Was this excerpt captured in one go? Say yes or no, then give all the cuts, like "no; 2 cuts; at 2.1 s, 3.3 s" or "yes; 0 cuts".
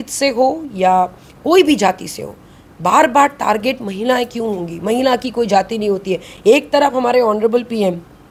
yes; 0 cuts